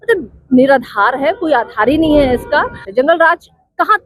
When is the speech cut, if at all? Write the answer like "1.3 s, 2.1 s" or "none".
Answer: 2.8 s